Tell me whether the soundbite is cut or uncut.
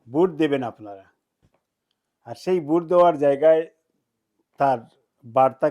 uncut